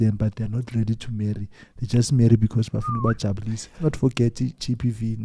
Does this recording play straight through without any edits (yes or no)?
no